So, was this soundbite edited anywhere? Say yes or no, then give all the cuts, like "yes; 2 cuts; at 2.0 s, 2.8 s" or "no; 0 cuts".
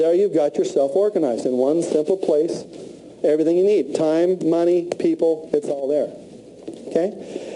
yes; 1 cut; at 2.4 s